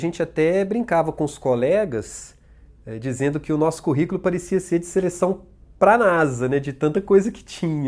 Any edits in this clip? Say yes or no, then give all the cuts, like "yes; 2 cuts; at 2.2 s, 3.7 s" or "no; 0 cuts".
no; 0 cuts